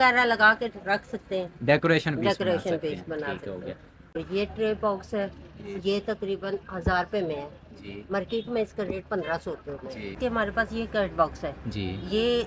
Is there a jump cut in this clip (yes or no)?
yes